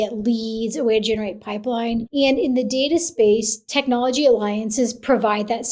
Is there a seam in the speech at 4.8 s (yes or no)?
no